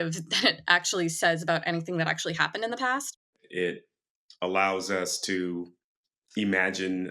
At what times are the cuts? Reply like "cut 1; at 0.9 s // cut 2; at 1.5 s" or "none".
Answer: cut 1; at 3.3 s